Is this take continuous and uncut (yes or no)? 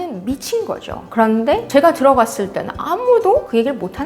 yes